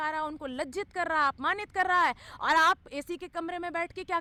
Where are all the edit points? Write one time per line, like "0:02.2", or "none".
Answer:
none

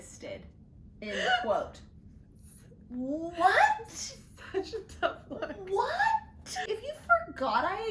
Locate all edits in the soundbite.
0:06.6

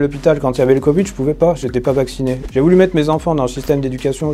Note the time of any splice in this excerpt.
0:02.4

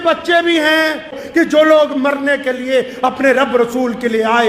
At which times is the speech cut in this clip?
0:01.2

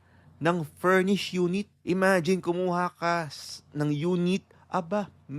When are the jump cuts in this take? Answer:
0:01.7

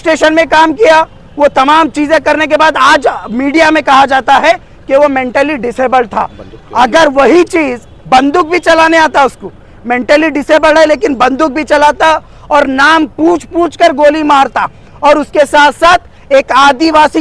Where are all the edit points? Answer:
none

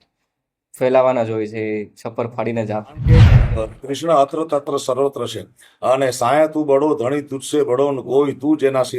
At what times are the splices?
0:03.4

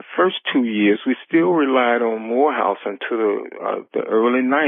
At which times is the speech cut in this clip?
none

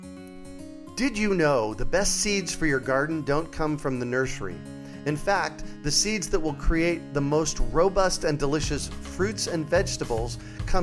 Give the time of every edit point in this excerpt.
0:01.0

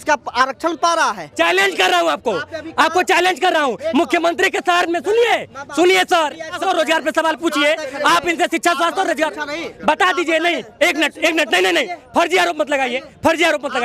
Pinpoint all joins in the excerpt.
0:01.2
0:06.6

